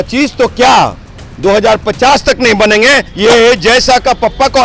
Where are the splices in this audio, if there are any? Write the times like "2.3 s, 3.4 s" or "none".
3.1 s